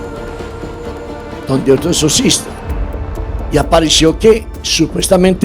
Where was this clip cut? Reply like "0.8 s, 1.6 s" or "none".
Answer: 1.5 s

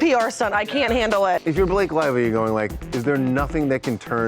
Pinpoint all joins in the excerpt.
1.4 s

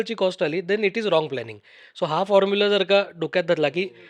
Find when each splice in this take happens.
none

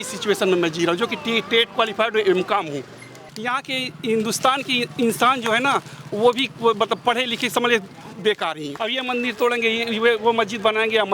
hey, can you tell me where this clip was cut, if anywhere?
3.3 s, 8.7 s

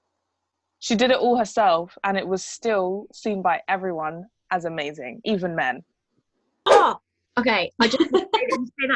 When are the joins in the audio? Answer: 6.7 s

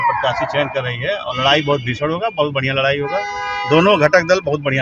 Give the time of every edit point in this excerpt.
none

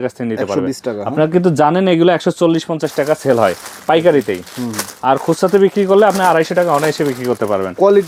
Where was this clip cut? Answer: none

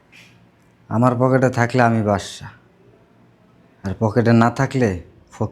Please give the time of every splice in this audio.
none

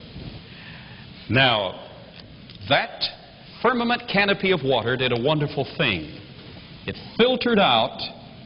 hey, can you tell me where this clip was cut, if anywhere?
1.7 s

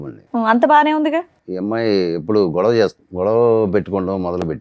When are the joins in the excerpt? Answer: 1.4 s, 3.0 s

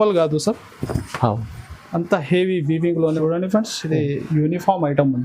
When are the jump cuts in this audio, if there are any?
3.2 s

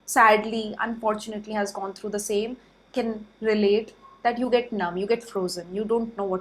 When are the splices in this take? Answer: none

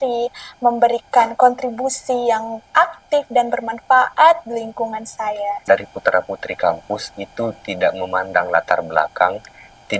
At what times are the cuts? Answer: 5.6 s

